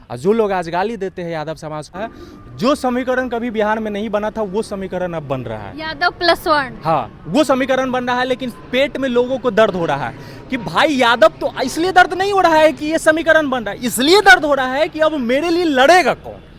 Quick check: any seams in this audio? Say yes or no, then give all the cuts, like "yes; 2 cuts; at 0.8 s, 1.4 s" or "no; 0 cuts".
yes; 1 cut; at 1.9 s